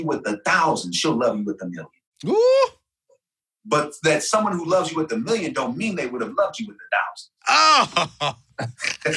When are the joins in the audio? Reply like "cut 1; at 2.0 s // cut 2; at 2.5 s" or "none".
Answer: none